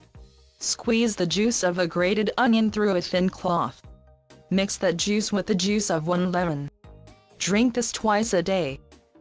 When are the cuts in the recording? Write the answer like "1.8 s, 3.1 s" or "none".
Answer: 5.3 s